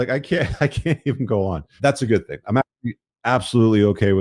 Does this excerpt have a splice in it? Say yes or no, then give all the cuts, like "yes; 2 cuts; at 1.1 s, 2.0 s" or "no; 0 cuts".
yes; 1 cut; at 1.7 s